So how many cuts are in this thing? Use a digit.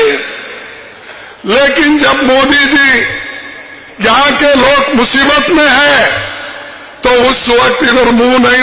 0